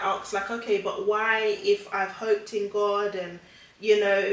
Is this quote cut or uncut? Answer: uncut